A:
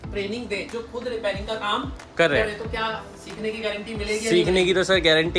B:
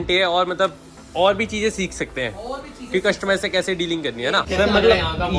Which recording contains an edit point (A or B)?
B